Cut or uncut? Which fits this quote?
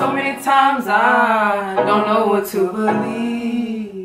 uncut